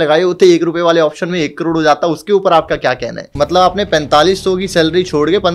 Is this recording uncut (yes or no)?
no